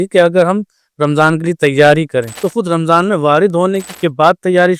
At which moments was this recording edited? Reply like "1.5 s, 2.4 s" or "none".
2.4 s, 3.9 s